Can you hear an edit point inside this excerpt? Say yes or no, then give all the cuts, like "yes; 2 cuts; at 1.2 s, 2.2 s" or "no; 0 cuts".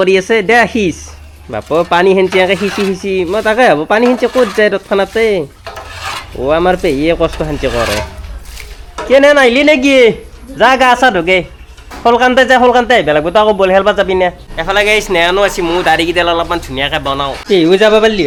no; 0 cuts